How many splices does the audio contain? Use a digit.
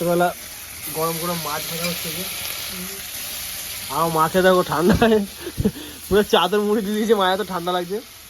0